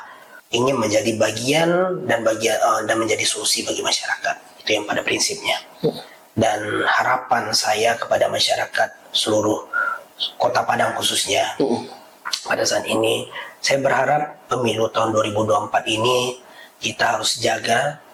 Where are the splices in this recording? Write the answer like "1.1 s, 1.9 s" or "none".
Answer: none